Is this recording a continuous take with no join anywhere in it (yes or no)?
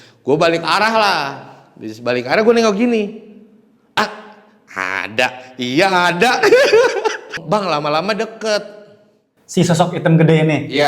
no